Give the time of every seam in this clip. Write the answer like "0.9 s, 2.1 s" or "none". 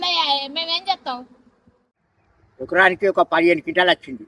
1.9 s

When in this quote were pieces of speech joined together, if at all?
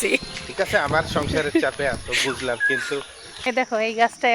3.2 s

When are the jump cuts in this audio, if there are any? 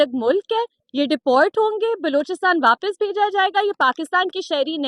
none

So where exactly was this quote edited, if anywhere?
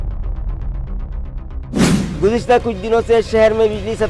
2.1 s

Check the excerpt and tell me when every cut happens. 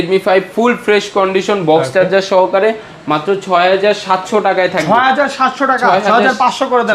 none

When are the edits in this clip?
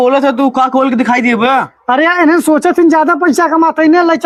none

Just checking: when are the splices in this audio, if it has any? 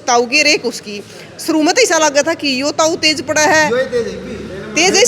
none

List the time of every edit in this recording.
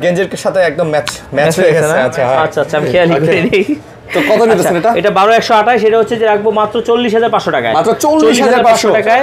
none

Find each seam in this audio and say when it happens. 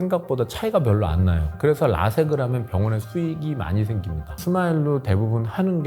4.4 s

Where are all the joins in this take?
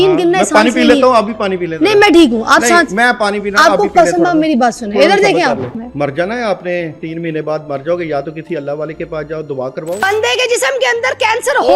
5.8 s, 10.0 s

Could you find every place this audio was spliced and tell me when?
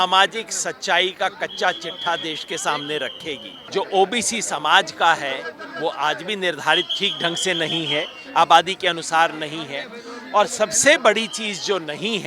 3.5 s

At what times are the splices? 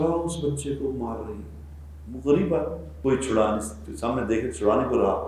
2.9 s

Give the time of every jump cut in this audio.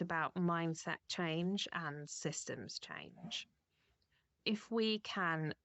4.4 s

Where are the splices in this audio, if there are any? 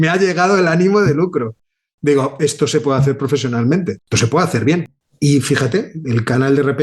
5.0 s

